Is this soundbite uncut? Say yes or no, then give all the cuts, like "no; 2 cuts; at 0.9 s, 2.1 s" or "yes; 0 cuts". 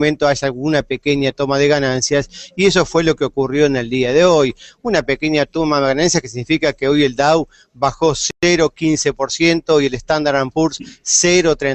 yes; 0 cuts